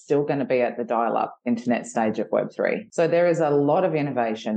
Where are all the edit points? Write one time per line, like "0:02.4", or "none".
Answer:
0:02.8